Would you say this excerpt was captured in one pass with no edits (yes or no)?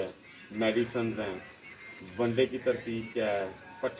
yes